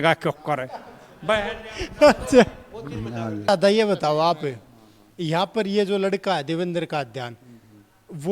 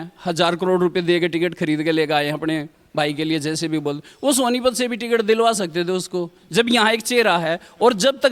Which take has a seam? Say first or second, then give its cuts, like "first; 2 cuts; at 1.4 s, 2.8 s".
first; 1 cut; at 3.5 s